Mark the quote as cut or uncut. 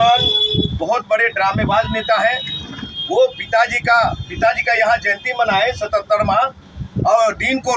uncut